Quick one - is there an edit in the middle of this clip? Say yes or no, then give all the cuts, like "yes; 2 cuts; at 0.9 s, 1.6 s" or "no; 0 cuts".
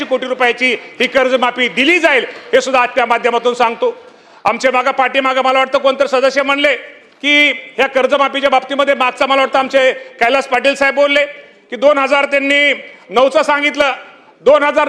no; 0 cuts